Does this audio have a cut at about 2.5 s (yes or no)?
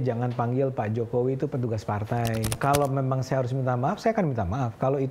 yes